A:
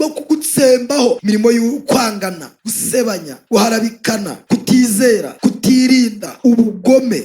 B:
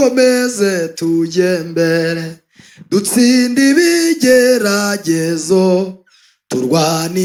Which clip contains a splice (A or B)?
A